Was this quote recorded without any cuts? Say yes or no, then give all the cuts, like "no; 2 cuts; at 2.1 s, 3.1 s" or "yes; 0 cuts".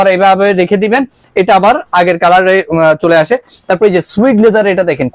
no; 1 cut; at 3.5 s